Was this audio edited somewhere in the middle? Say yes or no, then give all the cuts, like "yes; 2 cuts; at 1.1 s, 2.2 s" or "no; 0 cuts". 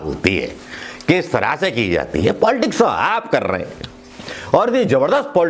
no; 0 cuts